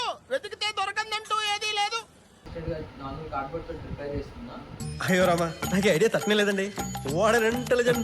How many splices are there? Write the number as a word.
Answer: one